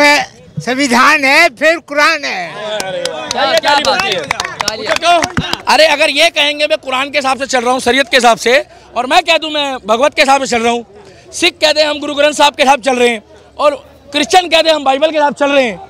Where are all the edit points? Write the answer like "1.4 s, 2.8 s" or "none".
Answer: 5.5 s